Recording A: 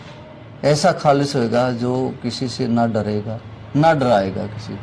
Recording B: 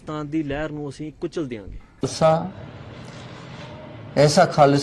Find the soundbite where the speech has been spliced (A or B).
B